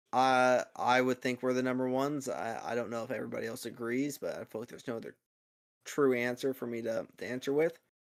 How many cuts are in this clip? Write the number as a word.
zero